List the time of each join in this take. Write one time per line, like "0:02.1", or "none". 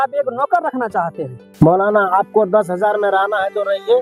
0:01.4